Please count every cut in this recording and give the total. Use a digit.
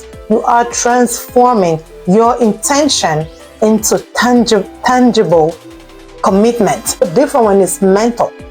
1